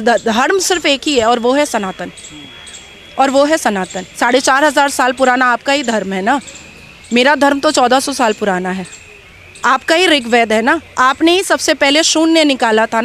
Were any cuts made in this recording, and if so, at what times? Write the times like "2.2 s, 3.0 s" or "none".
none